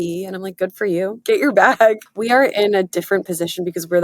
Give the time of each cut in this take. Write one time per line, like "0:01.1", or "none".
0:01.2
0:02.1